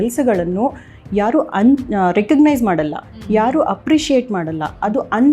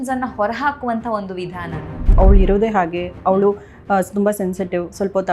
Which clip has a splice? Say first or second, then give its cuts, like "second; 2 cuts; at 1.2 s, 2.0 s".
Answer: second; 1 cut; at 2.1 s